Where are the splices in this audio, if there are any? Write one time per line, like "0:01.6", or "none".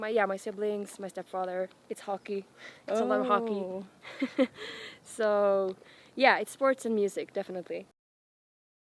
none